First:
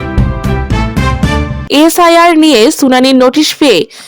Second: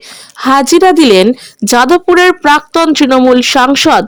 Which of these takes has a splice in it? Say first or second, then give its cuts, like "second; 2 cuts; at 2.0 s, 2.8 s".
first; 1 cut; at 1.6 s